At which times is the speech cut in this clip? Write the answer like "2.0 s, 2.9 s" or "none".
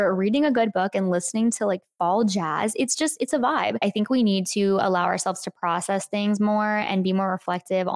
3.8 s